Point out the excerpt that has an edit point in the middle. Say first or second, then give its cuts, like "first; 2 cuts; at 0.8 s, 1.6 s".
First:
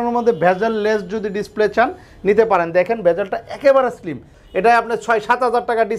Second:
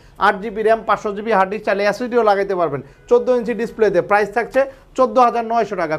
first; 1 cut; at 4.3 s